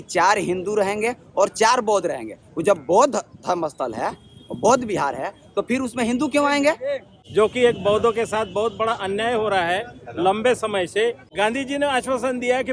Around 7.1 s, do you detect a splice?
yes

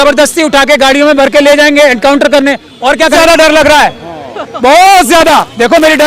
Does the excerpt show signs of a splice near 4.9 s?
no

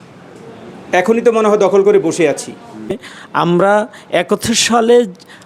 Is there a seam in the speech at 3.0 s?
yes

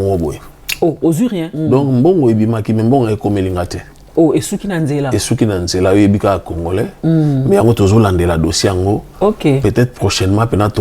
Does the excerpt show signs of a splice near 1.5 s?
yes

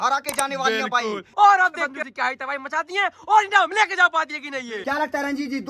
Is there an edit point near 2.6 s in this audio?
no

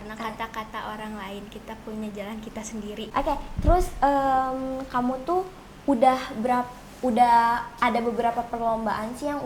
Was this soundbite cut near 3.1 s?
yes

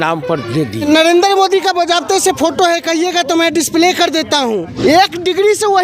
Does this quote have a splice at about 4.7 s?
yes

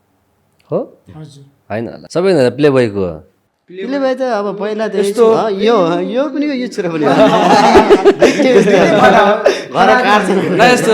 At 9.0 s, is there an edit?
no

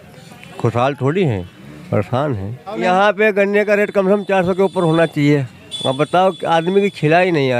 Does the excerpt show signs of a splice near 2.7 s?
yes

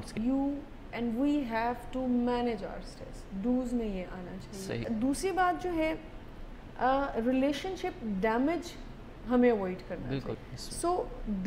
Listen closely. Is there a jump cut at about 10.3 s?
yes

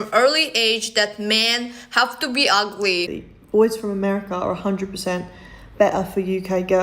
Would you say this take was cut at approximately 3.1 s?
yes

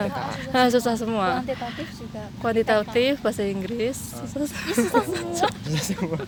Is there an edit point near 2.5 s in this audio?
no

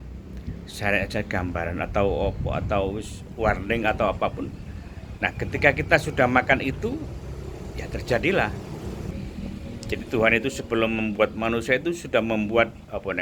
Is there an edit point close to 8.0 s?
no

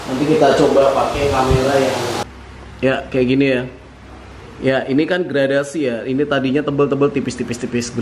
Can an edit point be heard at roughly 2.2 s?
yes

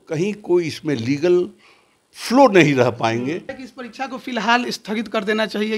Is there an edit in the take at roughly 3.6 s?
yes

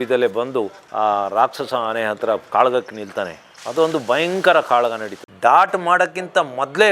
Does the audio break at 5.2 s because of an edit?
yes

